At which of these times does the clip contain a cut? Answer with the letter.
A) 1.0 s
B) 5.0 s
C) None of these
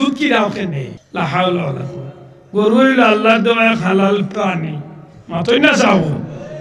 A